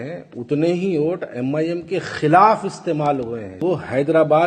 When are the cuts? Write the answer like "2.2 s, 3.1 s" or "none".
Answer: 3.6 s

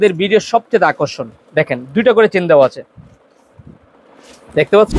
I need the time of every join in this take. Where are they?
none

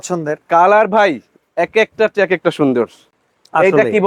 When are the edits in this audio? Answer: none

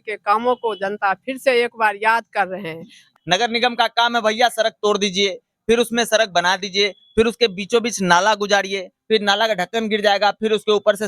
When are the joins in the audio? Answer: 3.0 s

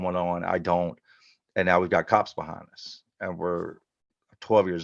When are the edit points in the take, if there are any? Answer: none

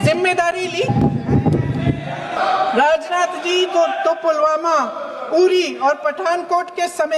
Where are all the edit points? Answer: 2.3 s

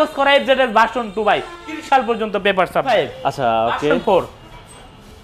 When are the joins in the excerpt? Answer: none

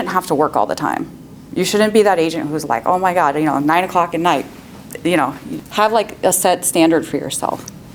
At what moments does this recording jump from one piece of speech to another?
none

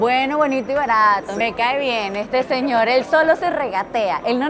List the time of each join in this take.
1.4 s

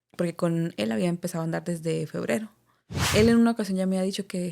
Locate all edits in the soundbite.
2.9 s

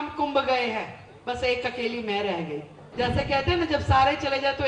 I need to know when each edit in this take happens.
2.8 s

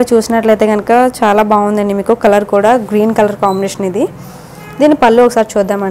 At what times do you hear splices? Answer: none

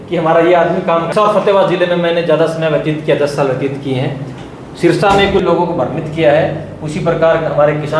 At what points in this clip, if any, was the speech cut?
1.1 s, 5.4 s

